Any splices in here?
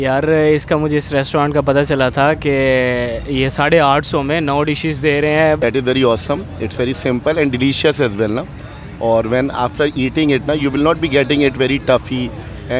yes; 1 cut; at 5.6 s

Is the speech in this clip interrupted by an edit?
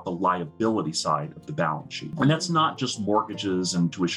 yes; 1 cut; at 2.1 s

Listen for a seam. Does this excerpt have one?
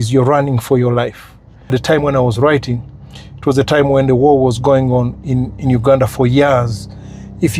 yes; 1 cut; at 1.7 s

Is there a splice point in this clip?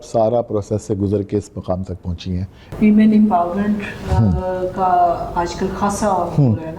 yes; 1 cut; at 2.6 s

